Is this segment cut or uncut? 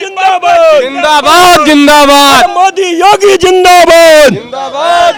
uncut